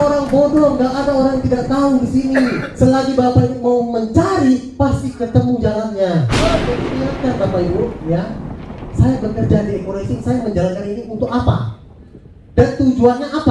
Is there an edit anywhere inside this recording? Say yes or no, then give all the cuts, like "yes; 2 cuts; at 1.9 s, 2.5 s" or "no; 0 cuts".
yes; 1 cut; at 6.9 s